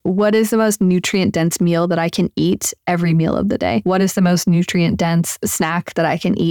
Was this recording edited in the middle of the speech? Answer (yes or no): yes